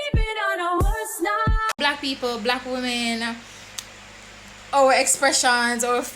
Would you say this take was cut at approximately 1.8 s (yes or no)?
yes